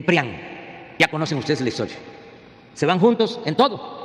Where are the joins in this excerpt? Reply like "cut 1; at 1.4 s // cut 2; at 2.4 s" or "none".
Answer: cut 1; at 1.0 s